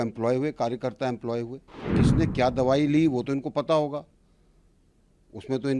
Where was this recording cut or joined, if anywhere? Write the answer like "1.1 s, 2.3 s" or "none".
1.7 s